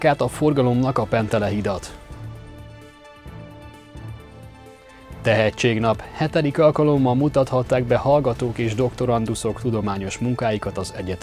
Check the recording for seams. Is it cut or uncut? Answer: uncut